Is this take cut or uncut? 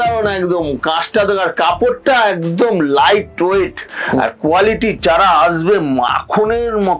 uncut